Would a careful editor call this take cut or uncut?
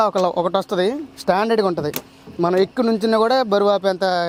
uncut